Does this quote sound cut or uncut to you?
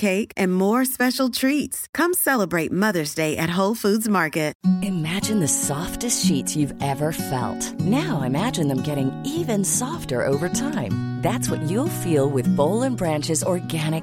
cut